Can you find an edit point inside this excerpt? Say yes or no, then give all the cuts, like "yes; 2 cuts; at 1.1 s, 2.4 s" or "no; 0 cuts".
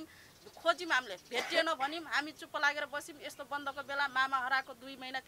no; 0 cuts